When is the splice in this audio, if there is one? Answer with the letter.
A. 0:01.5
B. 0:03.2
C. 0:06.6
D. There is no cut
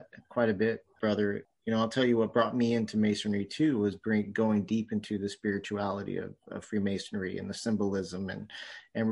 A